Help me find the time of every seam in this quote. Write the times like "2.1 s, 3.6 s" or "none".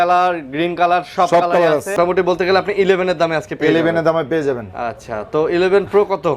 1.9 s

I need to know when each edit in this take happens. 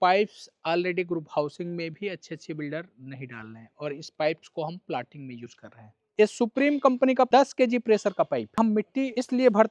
6.1 s, 7.3 s, 8.8 s

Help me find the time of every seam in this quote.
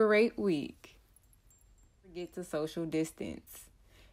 2.2 s

